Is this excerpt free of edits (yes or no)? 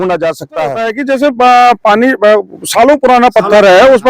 no